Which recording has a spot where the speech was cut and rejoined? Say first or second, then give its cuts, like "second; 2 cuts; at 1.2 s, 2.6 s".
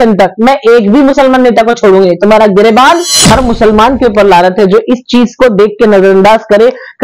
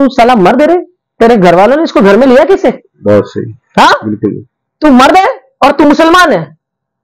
first; 1 cut; at 3.1 s